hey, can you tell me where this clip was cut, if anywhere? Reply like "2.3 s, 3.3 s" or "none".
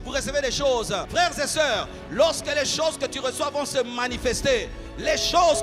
1.1 s